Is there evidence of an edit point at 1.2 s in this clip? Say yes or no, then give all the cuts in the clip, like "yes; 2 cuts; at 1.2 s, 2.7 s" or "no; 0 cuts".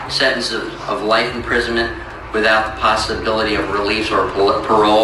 no; 0 cuts